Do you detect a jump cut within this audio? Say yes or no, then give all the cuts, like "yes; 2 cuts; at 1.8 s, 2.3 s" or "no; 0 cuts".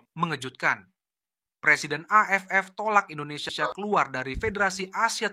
yes; 1 cut; at 3.4 s